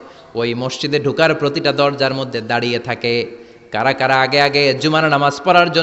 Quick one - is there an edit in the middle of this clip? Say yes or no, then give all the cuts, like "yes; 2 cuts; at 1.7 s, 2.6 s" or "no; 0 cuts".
no; 0 cuts